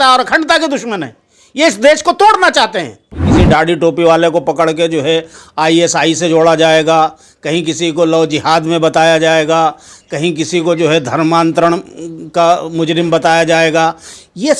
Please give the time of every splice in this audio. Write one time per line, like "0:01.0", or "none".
0:03.3